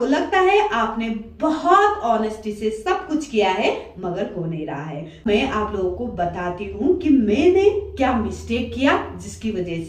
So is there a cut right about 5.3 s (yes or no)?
yes